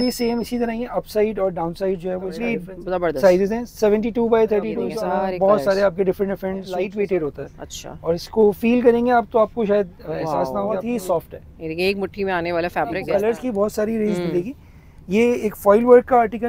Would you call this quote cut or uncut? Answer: cut